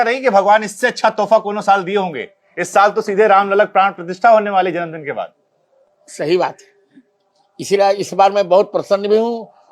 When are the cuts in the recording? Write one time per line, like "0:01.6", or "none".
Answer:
none